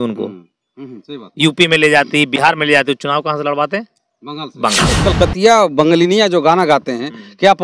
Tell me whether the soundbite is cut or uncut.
cut